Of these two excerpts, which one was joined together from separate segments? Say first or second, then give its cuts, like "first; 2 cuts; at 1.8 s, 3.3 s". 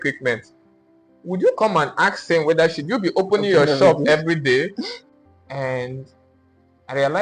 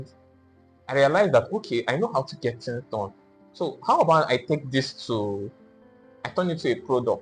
first; 1 cut; at 5.0 s